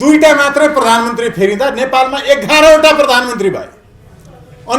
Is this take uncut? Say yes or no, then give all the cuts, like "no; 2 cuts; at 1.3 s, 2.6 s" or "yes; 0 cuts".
yes; 0 cuts